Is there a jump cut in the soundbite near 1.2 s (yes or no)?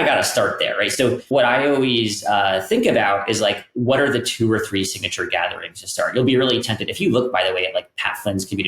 yes